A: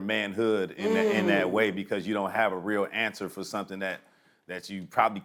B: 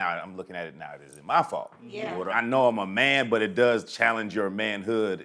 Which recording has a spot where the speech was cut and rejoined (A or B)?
B